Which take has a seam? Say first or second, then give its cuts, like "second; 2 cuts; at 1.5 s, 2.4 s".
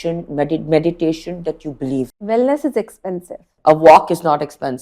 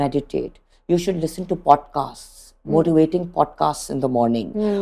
first; 2 cuts; at 2.2 s, 3.5 s